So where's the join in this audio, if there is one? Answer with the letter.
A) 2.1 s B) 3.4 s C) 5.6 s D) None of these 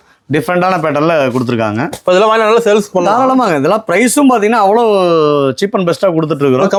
D